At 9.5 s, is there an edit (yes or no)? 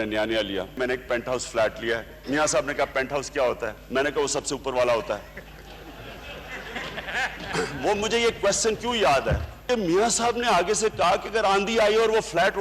yes